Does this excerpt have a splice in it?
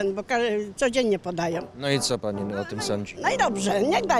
no; 0 cuts

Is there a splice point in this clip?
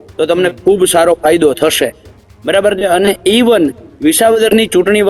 no; 0 cuts

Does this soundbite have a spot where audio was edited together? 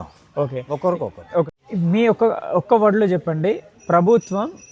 yes; 1 cut; at 1.5 s

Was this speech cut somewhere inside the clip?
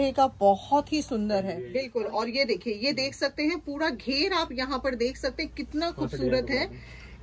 yes; 1 cut; at 1.6 s

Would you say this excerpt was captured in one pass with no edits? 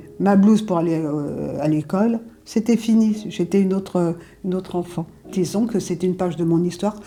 yes; 0 cuts

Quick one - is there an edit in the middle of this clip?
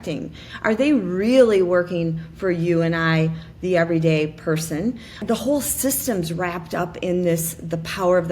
yes; 1 cut; at 5.2 s

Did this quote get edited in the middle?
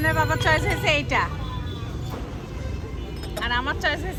no; 0 cuts

